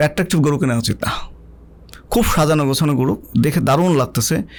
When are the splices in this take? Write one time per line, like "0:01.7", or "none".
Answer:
none